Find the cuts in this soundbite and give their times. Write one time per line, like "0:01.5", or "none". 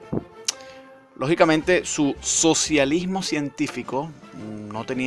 0:01.2